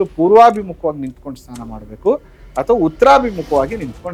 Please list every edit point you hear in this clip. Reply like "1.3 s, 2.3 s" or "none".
none